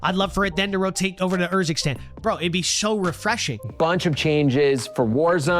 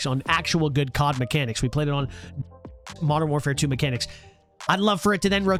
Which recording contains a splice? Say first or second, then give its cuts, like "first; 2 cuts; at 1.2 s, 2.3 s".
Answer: first; 1 cut; at 3.7 s